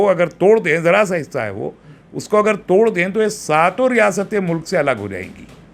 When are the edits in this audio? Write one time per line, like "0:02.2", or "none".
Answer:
none